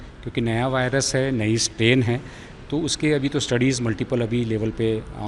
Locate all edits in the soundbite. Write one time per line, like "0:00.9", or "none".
none